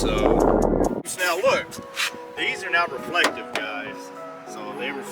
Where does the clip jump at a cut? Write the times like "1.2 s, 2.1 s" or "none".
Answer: 1.0 s

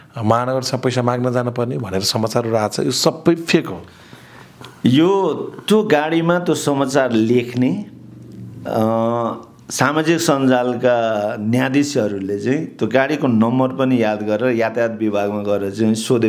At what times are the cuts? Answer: none

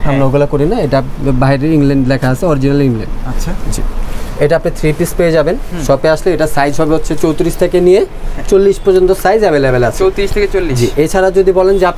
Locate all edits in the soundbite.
none

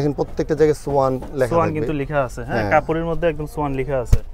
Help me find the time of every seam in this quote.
none

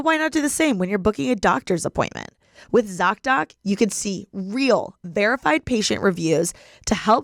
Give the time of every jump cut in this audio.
none

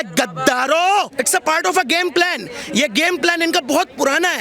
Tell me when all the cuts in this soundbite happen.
1.1 s

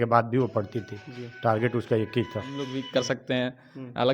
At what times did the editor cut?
2.7 s

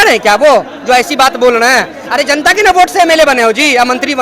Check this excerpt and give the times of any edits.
none

